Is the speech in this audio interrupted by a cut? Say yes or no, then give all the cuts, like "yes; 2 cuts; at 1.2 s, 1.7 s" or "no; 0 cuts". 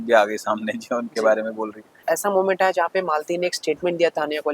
yes; 1 cut; at 2.0 s